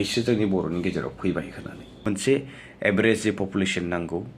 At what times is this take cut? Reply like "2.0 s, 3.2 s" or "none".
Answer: 2.0 s